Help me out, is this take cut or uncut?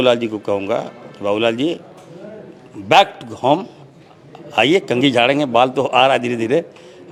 uncut